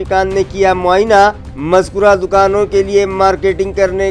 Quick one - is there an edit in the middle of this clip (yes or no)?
no